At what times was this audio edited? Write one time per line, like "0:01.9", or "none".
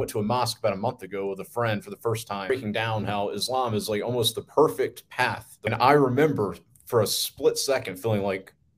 0:02.5
0:05.7